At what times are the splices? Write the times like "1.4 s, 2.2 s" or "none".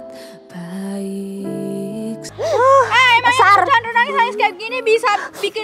2.3 s